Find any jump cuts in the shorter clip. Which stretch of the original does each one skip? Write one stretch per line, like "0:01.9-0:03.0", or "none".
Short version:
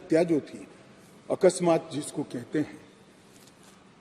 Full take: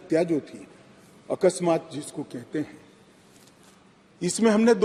none